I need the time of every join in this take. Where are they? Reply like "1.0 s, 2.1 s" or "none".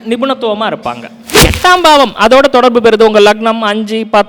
1.5 s